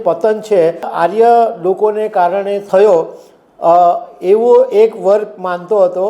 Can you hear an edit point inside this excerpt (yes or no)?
yes